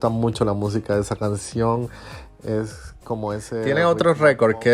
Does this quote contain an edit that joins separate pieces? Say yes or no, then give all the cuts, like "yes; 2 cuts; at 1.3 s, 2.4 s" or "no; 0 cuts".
yes; 1 cut; at 3.7 s